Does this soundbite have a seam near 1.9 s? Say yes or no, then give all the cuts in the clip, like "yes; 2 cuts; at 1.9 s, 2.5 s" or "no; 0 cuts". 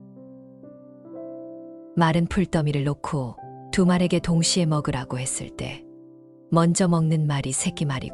yes; 1 cut; at 1.9 s